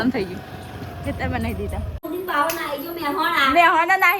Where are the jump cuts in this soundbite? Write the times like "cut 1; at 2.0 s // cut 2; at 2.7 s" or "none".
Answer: cut 1; at 2.0 s